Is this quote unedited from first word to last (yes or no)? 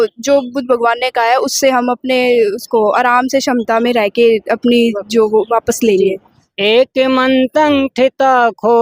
yes